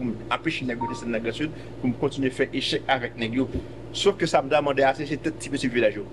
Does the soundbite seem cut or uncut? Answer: uncut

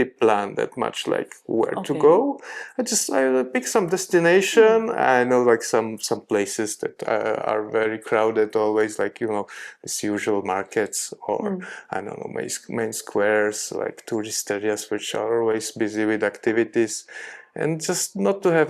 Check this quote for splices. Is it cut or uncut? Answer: uncut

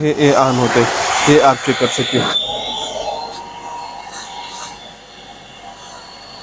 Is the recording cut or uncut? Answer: uncut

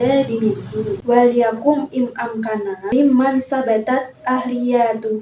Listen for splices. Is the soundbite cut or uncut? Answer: cut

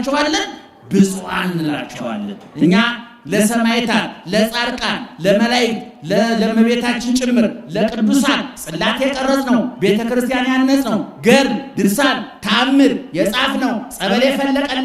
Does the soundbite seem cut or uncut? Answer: uncut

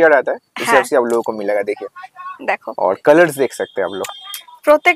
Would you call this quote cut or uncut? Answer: uncut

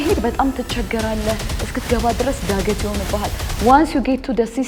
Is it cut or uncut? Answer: uncut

